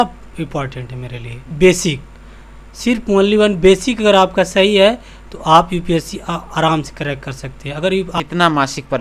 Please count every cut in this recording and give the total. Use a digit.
2